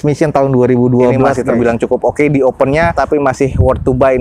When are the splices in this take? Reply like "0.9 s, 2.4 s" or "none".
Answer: 1.4 s, 2.9 s